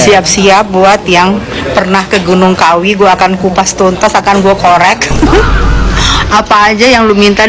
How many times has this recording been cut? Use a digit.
0